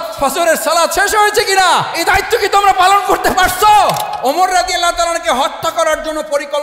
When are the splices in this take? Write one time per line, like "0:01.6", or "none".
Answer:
0:01.9
0:04.1